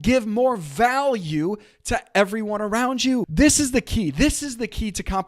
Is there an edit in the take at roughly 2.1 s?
no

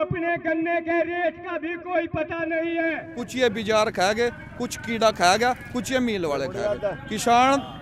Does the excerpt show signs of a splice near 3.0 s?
yes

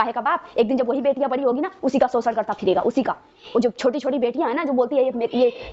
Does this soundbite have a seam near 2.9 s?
no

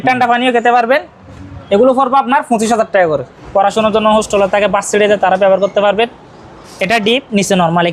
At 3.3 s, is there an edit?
yes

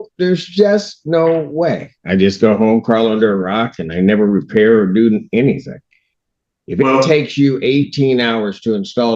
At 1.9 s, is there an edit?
yes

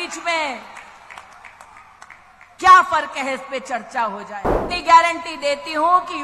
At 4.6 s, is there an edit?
yes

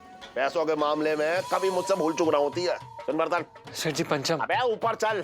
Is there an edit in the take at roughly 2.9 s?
yes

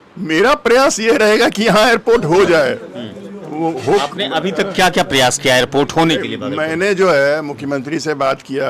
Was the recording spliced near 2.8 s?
no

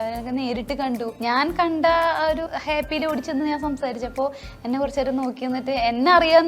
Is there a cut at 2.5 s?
yes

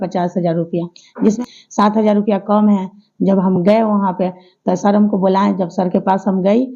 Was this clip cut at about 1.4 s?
yes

